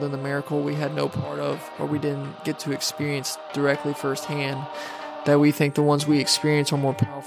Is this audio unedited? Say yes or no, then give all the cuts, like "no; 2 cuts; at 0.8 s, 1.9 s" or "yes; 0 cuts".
no; 1 cut; at 1.7 s